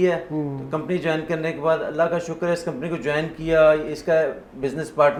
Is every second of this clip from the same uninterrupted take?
yes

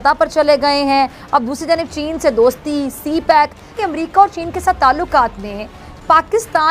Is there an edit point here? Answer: yes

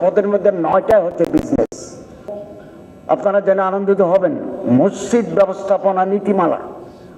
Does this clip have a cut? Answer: yes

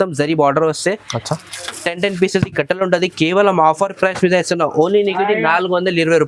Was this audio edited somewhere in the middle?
yes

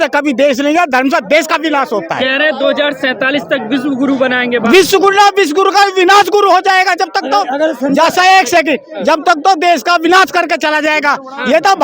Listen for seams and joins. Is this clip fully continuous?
yes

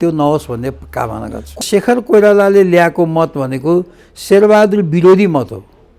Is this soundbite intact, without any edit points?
no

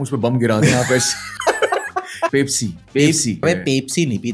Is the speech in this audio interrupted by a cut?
yes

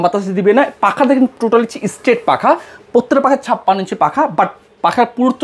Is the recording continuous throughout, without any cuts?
yes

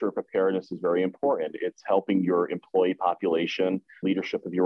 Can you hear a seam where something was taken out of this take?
no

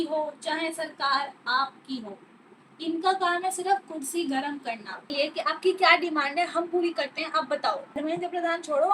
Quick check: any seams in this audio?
yes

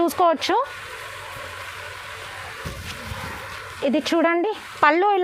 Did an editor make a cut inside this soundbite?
no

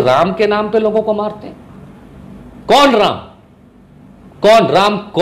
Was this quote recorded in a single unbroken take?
yes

